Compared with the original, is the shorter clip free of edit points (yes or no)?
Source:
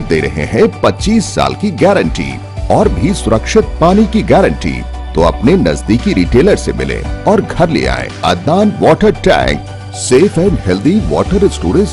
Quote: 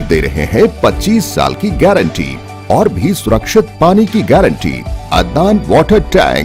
no